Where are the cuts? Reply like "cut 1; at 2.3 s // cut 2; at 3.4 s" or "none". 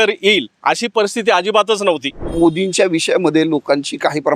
cut 1; at 2.2 s